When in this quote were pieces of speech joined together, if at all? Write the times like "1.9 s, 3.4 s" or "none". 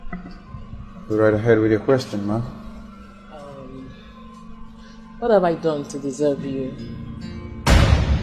none